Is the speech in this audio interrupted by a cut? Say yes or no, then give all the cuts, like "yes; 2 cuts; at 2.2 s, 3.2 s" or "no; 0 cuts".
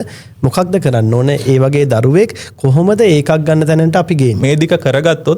yes; 1 cut; at 4.4 s